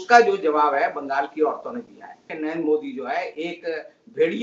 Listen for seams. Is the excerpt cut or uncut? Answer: cut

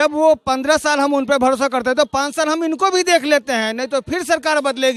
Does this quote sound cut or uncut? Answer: uncut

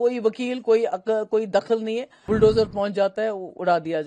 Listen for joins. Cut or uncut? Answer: cut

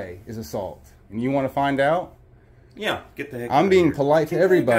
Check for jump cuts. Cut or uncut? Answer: uncut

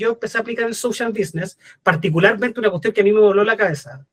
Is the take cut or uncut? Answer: uncut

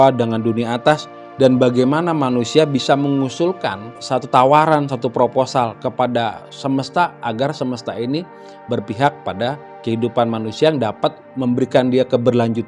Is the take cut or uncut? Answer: cut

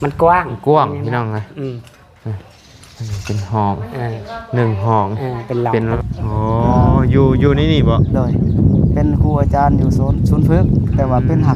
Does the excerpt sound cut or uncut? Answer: cut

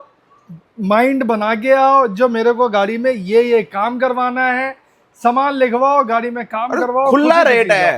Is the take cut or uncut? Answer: uncut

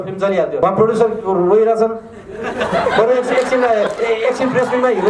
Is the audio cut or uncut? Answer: uncut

